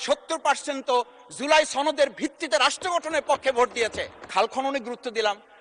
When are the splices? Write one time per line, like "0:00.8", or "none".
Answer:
0:04.3